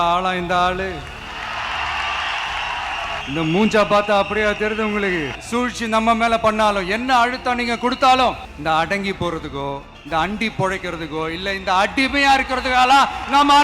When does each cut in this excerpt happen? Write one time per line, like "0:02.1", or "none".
0:03.2
0:05.4
0:08.5
0:09.9